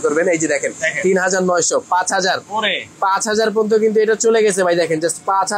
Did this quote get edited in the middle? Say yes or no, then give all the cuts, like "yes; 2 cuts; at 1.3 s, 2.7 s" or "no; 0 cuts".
no; 0 cuts